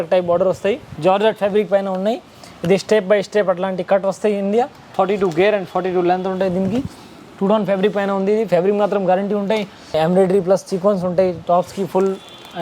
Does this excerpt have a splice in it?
yes; 3 cuts; at 0.9 s, 4.8 s, 9.8 s

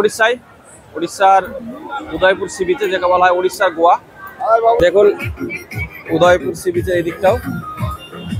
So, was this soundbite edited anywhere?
yes; 1 cut; at 4.8 s

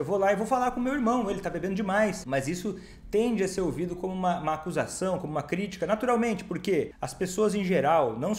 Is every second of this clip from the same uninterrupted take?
no; 2 cuts; at 2.2 s, 7.0 s

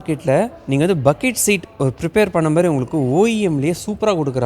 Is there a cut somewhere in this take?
no; 0 cuts

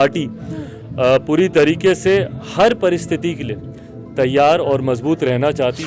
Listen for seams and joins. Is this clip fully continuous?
yes; 0 cuts

